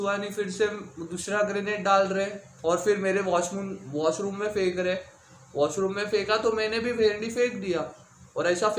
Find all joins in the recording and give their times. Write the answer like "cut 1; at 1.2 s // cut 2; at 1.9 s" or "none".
none